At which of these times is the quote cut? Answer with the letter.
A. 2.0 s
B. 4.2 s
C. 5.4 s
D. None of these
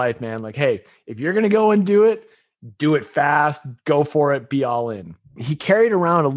C